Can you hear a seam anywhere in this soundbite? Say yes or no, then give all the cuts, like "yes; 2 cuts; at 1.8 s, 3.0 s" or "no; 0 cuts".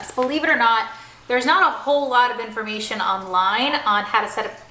no; 0 cuts